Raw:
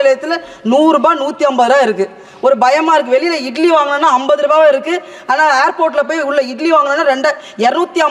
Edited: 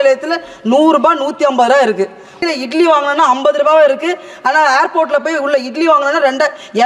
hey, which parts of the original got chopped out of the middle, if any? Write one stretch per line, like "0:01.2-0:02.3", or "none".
0:02.4-0:03.2